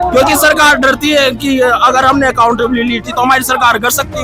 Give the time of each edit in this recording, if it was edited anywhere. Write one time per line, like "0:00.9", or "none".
none